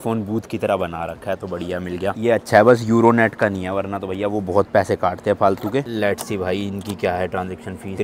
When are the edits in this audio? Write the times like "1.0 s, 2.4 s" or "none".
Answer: none